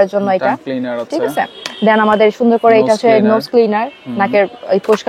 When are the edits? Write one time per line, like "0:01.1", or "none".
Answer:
none